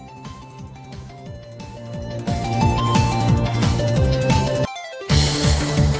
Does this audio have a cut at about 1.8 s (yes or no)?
no